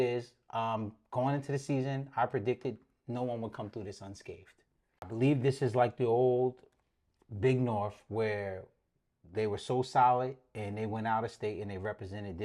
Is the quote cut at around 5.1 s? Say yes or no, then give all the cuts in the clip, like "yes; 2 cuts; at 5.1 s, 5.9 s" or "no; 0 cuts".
yes; 1 cut; at 5.1 s